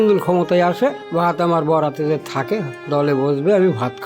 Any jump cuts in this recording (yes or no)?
yes